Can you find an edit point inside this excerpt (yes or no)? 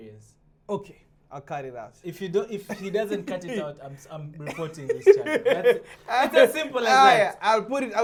no